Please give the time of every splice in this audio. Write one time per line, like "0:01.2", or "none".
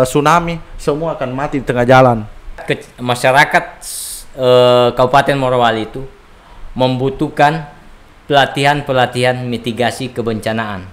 0:02.6